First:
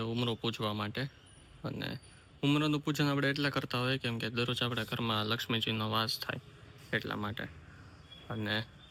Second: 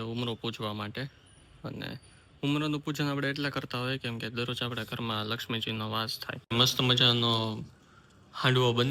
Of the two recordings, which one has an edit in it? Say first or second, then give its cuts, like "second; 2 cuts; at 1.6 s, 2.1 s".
second; 1 cut; at 6.4 s